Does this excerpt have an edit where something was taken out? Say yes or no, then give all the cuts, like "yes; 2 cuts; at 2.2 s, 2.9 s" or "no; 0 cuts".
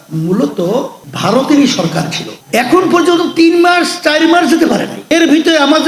yes; 1 cut; at 2.2 s